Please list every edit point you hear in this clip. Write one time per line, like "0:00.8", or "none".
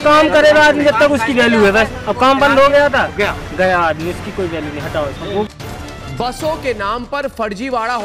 0:05.5